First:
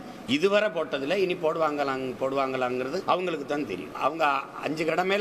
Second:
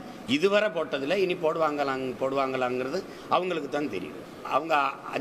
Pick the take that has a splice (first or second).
first